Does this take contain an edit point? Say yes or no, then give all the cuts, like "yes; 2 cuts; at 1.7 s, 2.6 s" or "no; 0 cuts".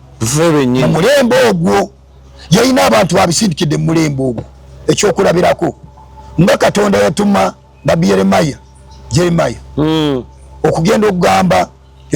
no; 0 cuts